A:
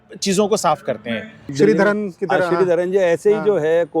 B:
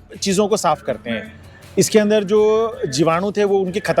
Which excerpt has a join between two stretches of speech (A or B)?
A